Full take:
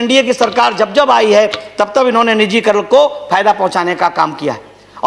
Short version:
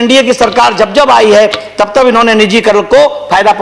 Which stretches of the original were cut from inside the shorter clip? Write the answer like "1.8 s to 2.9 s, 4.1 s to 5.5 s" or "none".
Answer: none